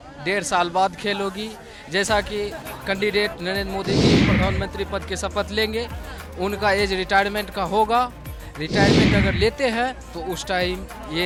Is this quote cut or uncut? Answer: uncut